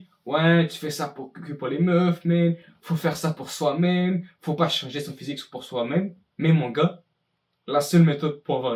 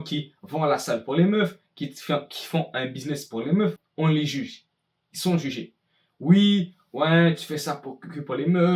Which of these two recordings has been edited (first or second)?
second